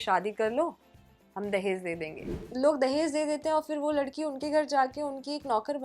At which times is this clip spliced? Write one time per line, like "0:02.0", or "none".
0:02.3